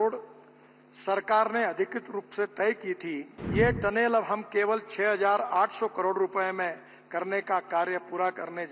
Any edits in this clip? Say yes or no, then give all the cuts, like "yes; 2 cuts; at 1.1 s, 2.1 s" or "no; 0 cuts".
yes; 1 cut; at 3.4 s